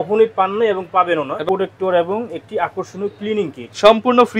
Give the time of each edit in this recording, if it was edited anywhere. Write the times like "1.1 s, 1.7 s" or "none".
1.4 s